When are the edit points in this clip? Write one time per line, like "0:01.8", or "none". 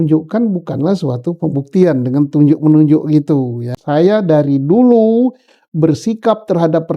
0:03.8